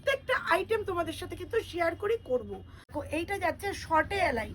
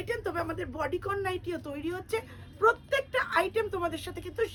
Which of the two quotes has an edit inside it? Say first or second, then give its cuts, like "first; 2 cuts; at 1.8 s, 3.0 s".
first; 1 cut; at 2.9 s